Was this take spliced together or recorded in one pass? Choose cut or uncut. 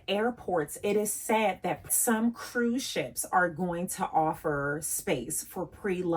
uncut